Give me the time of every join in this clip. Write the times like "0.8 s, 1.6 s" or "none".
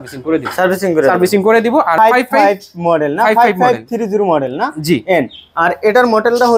1.9 s